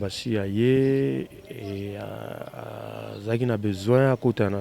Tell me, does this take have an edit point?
no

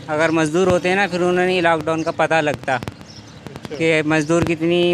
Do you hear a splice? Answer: no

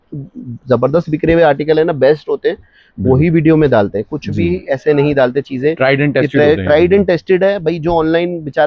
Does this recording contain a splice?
no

